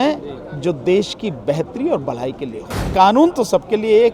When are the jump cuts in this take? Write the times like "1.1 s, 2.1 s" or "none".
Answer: 2.8 s